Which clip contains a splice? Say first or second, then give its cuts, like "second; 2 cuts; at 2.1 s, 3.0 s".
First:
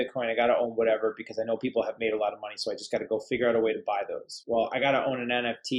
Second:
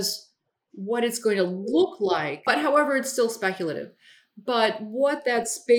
second; 1 cut; at 2.5 s